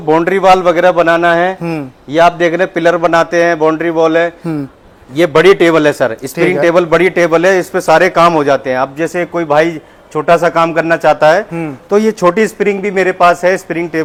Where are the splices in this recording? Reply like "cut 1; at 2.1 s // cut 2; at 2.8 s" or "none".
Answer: none